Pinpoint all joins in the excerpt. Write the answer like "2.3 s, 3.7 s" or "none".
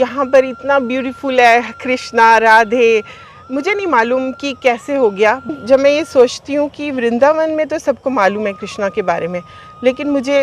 5.5 s